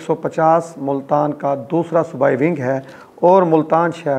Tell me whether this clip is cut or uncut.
uncut